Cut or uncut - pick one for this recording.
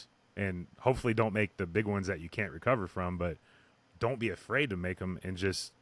uncut